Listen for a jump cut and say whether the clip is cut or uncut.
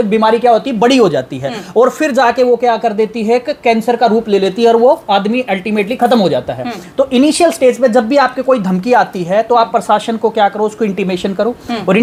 uncut